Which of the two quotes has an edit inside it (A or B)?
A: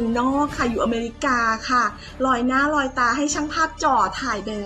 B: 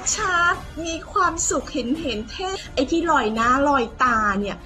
B